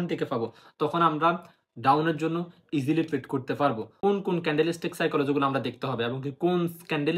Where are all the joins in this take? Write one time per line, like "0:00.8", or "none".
0:03.9